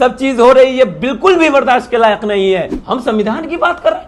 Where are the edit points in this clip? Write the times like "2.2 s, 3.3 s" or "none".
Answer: 2.8 s

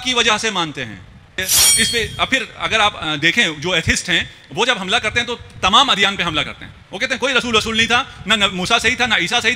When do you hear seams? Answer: 1.4 s

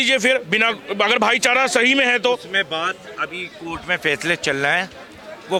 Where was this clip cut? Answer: none

